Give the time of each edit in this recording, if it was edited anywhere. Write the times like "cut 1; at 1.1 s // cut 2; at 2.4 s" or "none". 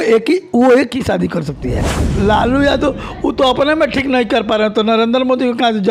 cut 1; at 2.1 s